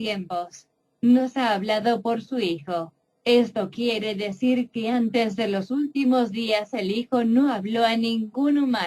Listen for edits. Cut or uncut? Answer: uncut